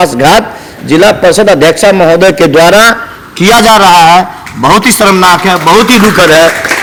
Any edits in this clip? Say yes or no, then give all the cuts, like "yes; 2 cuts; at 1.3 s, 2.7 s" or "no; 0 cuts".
no; 0 cuts